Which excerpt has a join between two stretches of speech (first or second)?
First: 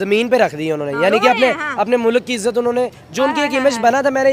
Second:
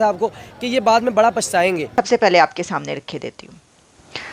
second